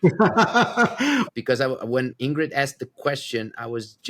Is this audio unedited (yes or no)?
no